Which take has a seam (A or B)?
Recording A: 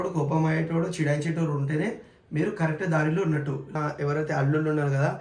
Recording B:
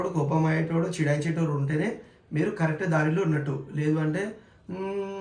A